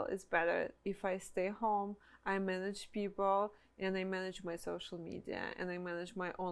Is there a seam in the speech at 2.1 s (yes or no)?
no